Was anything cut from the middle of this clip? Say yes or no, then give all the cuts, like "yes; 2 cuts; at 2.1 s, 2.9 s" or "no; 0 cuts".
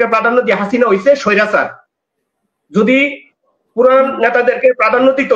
no; 0 cuts